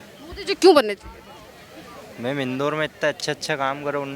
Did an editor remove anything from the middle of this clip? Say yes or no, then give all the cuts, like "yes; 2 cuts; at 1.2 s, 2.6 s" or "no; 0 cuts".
no; 0 cuts